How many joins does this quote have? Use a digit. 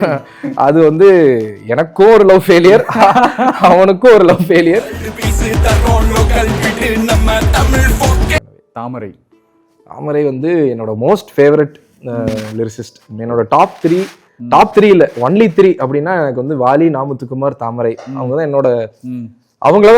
1